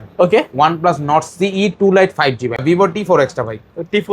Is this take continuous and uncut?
no; 1 cut; at 2.6 s

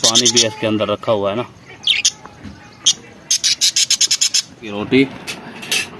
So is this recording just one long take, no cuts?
no; 1 cut; at 4.8 s

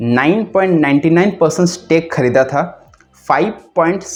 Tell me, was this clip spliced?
no; 0 cuts

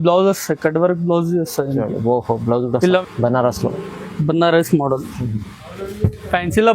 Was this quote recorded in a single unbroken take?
no; 1 cut; at 3.0 s

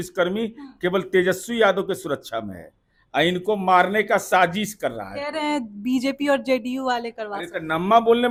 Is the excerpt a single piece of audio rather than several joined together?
yes; 0 cuts

